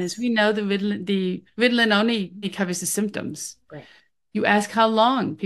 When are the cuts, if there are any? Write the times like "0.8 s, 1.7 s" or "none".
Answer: 1.4 s, 2.5 s

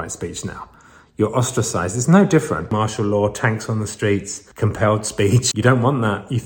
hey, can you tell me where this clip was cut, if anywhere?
2.7 s, 4.4 s, 5.5 s

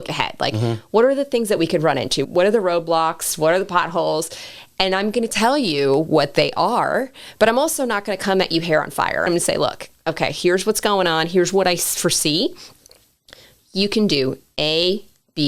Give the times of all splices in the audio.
2.2 s, 9.3 s

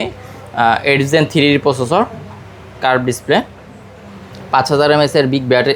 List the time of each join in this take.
none

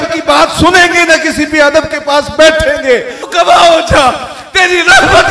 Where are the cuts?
3.2 s

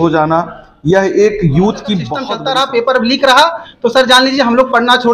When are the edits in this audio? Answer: 2.2 s

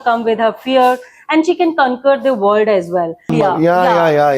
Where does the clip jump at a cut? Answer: 3.3 s

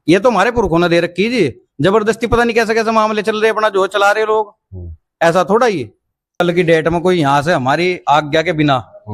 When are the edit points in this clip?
6.4 s

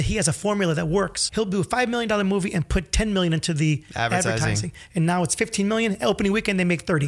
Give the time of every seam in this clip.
1.2 s

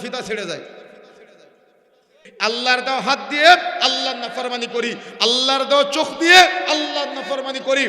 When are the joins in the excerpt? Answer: 2.3 s

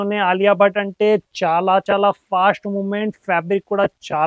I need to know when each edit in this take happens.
none

